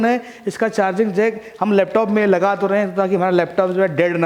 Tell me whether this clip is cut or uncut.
uncut